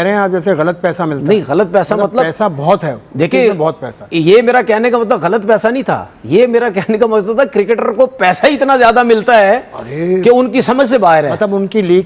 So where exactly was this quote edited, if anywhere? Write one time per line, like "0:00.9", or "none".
none